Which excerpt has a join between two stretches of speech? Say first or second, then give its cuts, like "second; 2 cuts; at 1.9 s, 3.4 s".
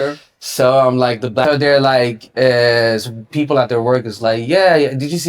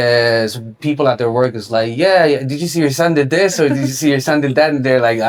first; 1 cut; at 1.4 s